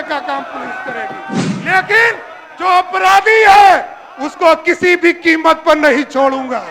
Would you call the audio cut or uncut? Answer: cut